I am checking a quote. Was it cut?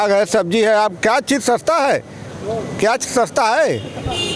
no; 0 cuts

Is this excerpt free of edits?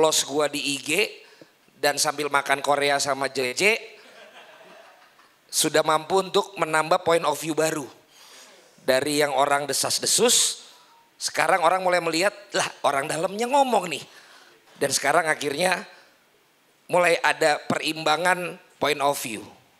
yes; 0 cuts

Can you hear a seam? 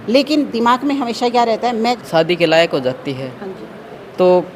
yes; 1 cut; at 2.0 s

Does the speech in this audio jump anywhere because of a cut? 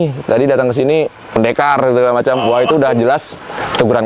no; 0 cuts

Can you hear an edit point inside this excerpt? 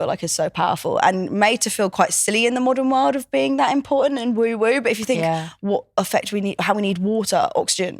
no; 0 cuts

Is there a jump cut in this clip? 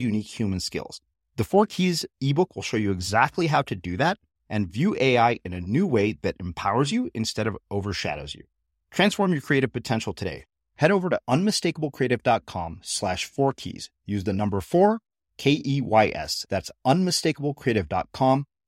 no; 0 cuts

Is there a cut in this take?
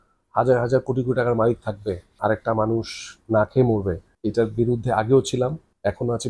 no; 0 cuts

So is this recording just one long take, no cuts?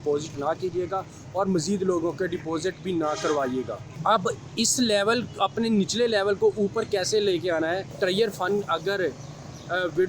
no; 2 cuts; at 3.8 s, 7.9 s

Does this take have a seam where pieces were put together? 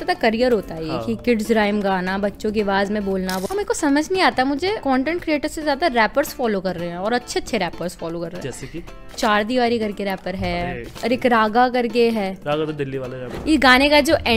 yes; 5 cuts; at 3.4 s, 4.8 s, 9.2 s, 10.9 s, 13.2 s

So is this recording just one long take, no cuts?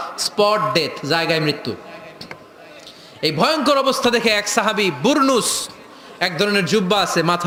yes; 0 cuts

